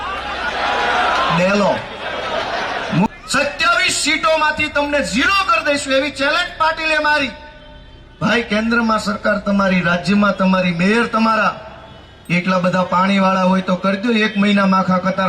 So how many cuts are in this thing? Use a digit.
1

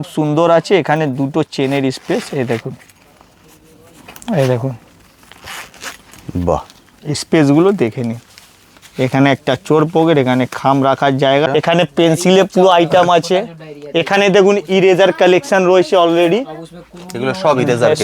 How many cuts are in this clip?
1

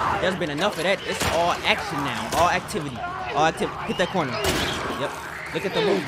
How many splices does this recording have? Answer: 1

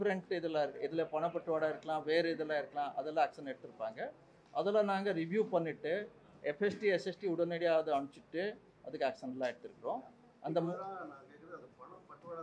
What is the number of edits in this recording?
0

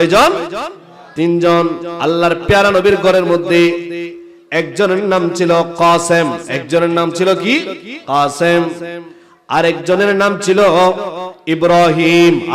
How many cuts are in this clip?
1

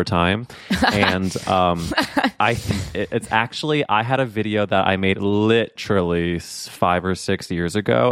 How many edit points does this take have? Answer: 1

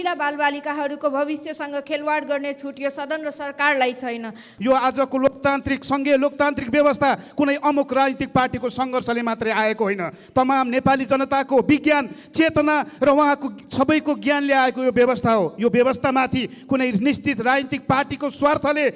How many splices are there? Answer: 1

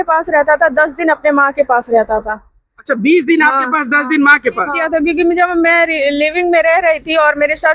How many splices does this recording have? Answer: 1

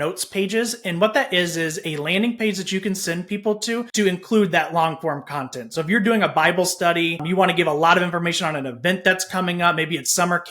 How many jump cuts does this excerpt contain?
2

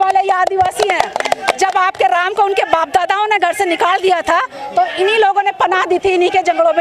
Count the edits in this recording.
0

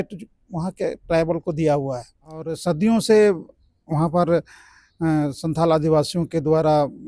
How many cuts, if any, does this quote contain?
1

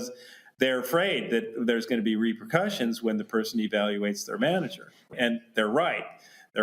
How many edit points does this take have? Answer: 1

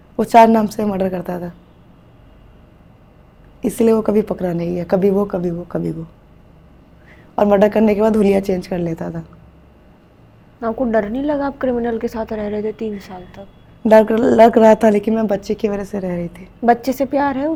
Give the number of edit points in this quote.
0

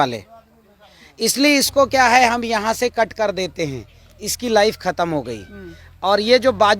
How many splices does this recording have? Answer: 0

